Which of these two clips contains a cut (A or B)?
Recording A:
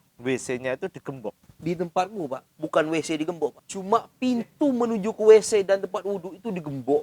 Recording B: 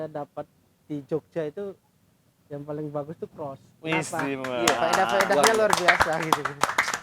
A